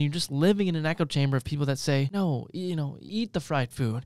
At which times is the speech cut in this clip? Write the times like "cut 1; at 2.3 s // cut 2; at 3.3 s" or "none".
cut 1; at 2.1 s // cut 2; at 3.0 s